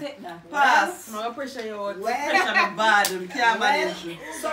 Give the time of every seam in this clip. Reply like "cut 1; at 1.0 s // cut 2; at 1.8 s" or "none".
cut 1; at 1.9 s